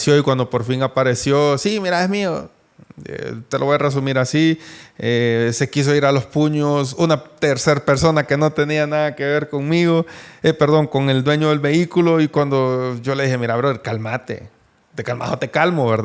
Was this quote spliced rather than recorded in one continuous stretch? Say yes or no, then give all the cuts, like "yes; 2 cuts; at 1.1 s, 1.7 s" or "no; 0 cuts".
no; 0 cuts